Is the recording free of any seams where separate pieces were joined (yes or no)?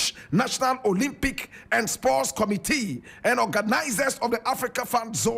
yes